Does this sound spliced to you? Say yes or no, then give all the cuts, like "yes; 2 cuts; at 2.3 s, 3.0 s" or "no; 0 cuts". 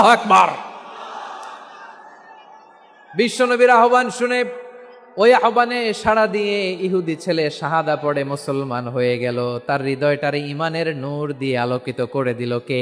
no; 0 cuts